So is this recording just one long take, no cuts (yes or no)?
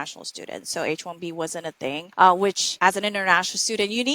no